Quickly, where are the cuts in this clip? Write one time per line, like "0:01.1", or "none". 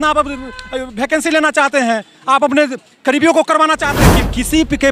0:04.0